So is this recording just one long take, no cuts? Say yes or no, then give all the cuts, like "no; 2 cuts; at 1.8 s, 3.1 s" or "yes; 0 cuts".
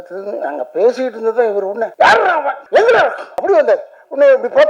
no; 2 cuts; at 2.2 s, 3.3 s